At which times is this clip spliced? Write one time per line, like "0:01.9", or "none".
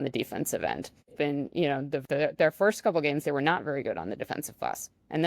0:01.1
0:02.0